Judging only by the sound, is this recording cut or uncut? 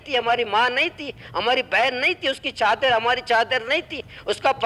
uncut